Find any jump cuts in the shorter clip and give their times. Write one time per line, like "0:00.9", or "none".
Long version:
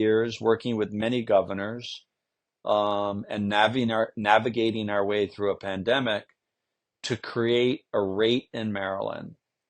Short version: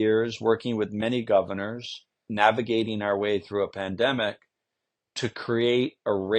0:02.3